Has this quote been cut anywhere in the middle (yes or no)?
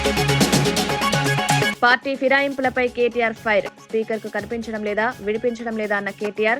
yes